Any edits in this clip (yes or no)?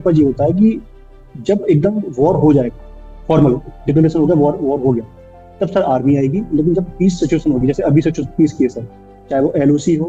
no